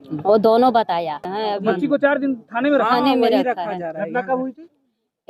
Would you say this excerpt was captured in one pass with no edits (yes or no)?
no